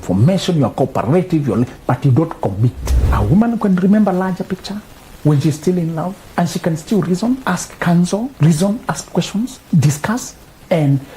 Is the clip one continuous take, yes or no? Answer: no